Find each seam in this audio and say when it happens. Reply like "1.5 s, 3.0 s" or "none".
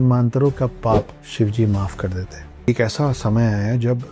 1.2 s, 2.7 s

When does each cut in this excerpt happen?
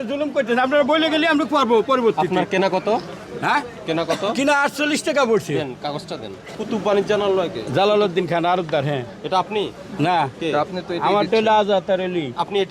6.5 s

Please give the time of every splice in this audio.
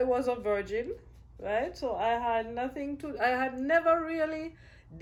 none

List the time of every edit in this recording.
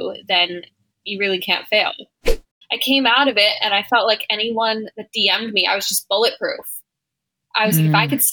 2.4 s

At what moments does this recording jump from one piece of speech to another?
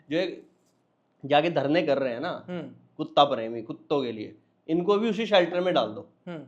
none

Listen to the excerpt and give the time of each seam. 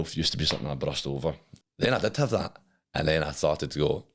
1.5 s

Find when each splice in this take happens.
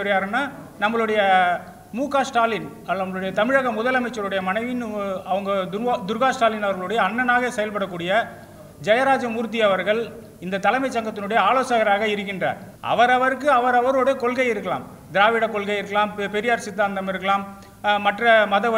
12.7 s

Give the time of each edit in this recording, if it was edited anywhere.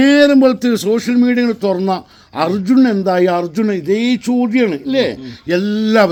none

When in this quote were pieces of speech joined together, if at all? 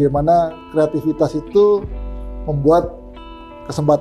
none

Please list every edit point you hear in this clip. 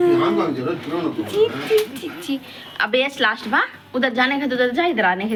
none

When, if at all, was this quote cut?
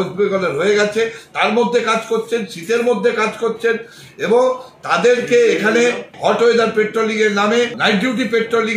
none

